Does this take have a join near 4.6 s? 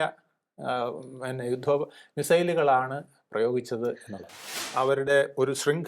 yes; 1 cut; at 4.6 s

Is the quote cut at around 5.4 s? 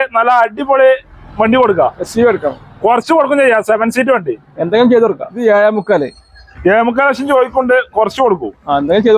yes; 1 cut; at 5.4 s

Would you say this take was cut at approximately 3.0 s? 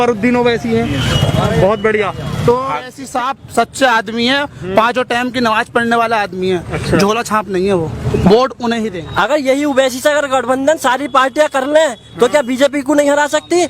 yes; 2 cuts; at 3.0 s, 9.0 s

